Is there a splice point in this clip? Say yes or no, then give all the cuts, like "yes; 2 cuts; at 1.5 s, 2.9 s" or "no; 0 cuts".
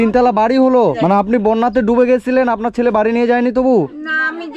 yes; 1 cut; at 1.0 s